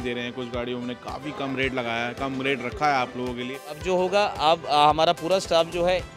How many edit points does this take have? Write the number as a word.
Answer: one